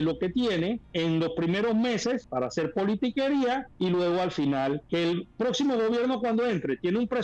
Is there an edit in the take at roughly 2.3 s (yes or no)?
yes